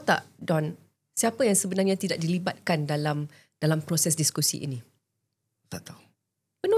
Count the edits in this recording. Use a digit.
0